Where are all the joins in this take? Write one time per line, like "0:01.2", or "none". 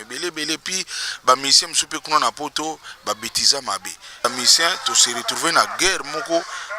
0:04.2